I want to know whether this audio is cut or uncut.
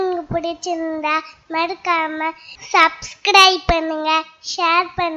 uncut